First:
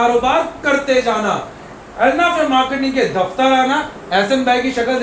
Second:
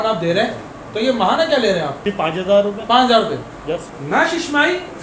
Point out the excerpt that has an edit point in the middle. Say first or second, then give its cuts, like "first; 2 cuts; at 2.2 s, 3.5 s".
second; 2 cuts; at 2.0 s, 3.9 s